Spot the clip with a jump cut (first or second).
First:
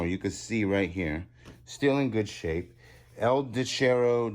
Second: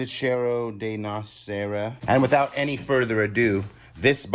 second